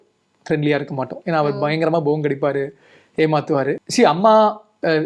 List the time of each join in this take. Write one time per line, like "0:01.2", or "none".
0:03.8